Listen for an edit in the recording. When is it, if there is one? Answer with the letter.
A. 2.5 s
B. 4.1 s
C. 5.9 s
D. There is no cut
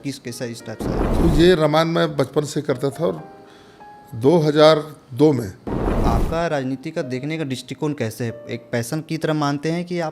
C